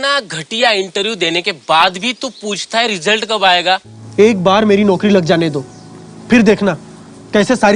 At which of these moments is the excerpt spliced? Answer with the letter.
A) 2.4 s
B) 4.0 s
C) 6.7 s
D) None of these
B